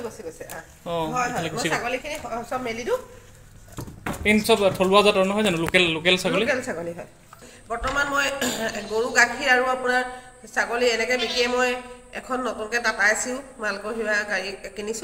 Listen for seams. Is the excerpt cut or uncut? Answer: cut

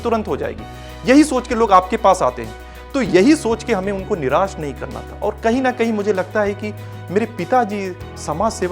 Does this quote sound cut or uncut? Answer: uncut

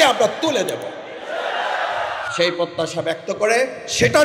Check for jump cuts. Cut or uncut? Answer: uncut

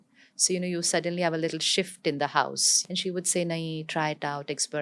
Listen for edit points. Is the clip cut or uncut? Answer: cut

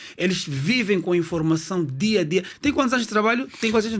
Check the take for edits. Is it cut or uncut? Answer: uncut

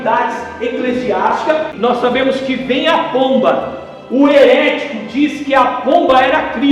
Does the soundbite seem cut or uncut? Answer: cut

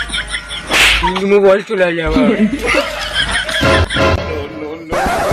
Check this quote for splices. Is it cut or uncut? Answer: cut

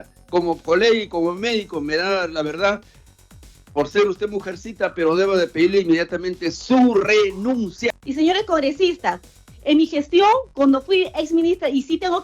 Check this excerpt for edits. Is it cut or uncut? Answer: cut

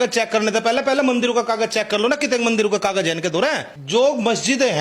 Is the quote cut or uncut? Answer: cut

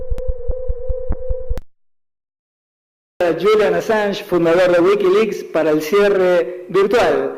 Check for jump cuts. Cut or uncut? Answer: cut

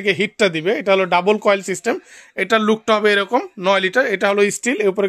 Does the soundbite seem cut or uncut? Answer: uncut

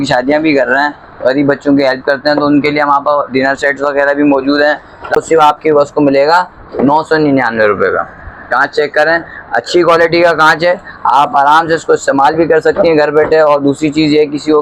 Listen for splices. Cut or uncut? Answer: cut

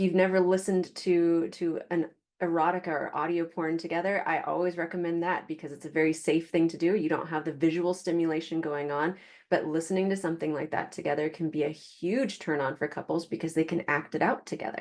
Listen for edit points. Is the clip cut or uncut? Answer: uncut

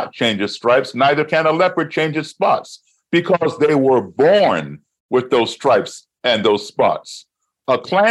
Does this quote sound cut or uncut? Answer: uncut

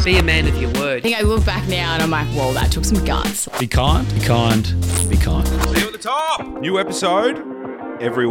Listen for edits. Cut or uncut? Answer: uncut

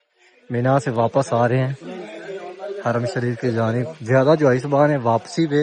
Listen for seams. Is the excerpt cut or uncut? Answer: uncut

